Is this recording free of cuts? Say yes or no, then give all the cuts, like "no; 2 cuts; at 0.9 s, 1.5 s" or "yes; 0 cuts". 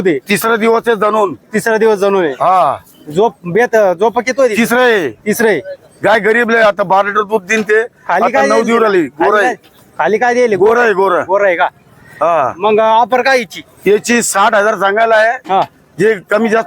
yes; 0 cuts